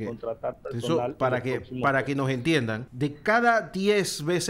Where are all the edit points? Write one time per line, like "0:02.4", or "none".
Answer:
0:02.8